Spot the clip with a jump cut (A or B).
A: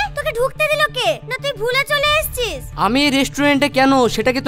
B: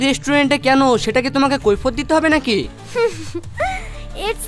B